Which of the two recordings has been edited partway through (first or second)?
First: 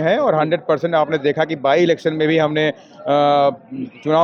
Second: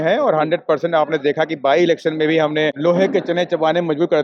second